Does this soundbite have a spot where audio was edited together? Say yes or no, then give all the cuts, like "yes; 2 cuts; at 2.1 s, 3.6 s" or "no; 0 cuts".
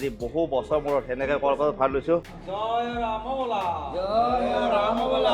yes; 1 cut; at 2.4 s